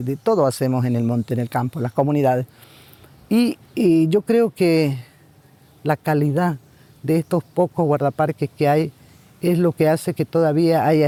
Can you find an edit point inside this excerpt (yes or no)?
no